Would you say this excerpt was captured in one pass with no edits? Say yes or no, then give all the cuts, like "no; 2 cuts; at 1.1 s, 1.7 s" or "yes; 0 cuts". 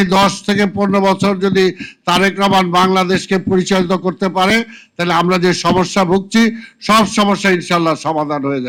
yes; 0 cuts